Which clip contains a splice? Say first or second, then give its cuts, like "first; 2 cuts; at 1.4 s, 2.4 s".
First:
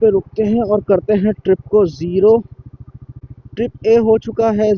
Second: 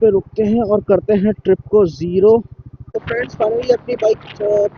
second; 1 cut; at 3.0 s